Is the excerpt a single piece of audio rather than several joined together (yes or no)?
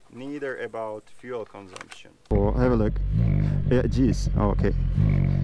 no